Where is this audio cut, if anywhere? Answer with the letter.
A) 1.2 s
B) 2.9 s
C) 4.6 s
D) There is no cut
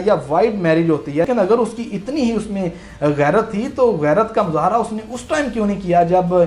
A